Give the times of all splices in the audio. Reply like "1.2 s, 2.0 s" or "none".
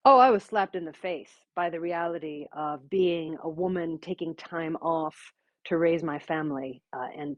none

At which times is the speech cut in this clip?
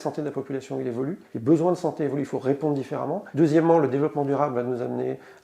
1.2 s, 3.2 s

